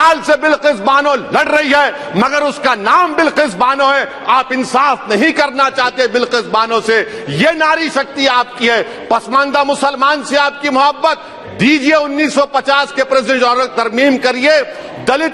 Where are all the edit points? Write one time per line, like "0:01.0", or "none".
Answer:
none